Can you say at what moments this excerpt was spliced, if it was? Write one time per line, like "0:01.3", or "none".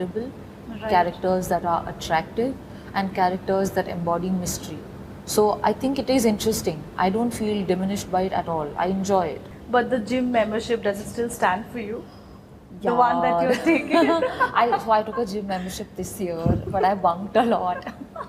0:09.5